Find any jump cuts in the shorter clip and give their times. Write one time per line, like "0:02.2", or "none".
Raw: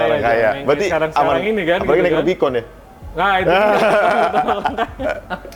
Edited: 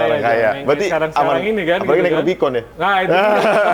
0:02.7